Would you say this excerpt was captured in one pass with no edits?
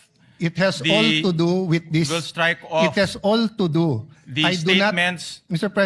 yes; 0 cuts

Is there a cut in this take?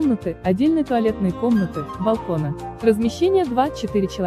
yes; 1 cut; at 2.6 s

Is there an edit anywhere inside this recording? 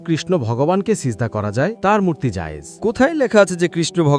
no; 0 cuts

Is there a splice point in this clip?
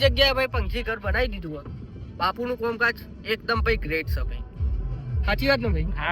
no; 0 cuts

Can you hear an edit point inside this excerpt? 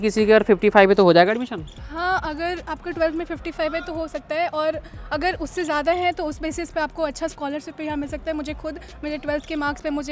no; 0 cuts

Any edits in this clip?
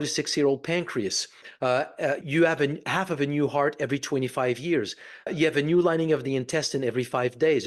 yes; 2 cuts; at 2.2 s, 5.3 s

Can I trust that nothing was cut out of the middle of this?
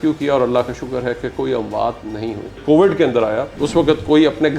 no; 2 cuts; at 2.6 s, 3.6 s

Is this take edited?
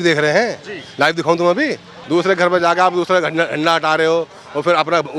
yes; 1 cut; at 1.9 s

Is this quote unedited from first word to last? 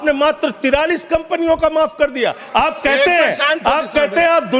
yes; 0 cuts

